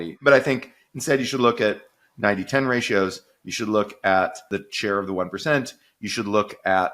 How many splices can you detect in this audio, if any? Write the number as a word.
one